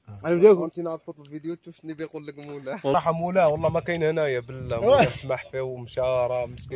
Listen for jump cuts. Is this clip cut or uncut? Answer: cut